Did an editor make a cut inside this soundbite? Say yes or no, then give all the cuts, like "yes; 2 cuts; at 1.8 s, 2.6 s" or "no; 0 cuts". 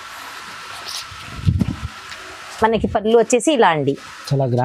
no; 0 cuts